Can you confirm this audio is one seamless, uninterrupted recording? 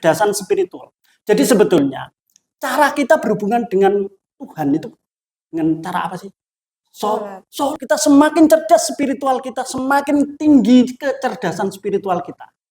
no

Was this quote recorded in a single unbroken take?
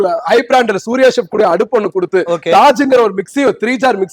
yes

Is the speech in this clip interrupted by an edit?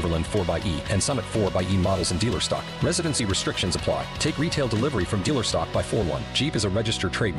no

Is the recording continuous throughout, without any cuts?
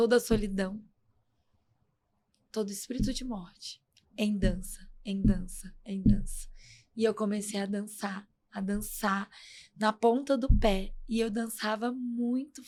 yes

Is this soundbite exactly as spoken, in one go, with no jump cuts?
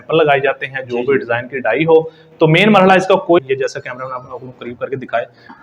no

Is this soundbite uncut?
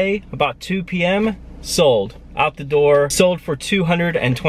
no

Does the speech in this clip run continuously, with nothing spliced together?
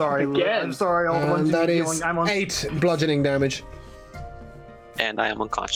yes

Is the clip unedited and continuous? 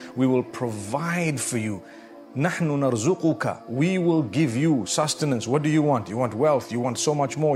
yes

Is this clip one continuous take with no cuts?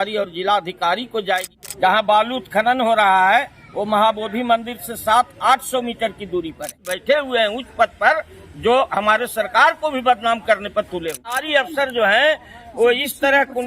no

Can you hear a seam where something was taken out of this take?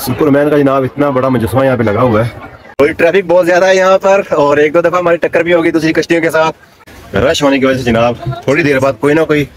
yes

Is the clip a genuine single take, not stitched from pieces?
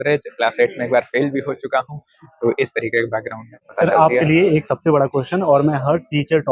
no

